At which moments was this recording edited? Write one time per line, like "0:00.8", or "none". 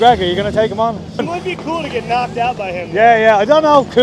0:01.3